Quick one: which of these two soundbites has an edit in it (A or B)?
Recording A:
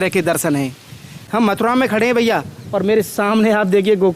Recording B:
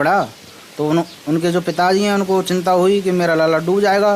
A